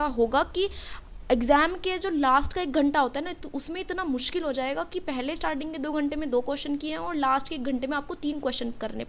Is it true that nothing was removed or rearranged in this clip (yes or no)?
yes